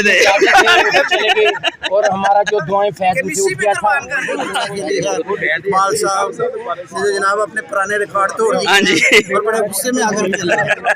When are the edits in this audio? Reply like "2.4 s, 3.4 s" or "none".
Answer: 4.5 s